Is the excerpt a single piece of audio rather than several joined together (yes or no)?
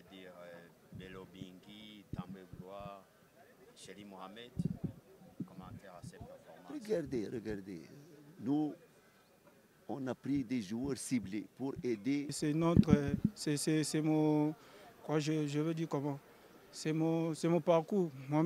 no